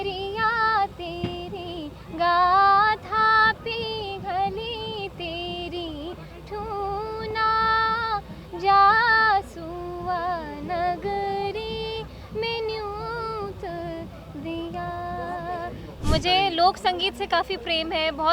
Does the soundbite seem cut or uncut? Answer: cut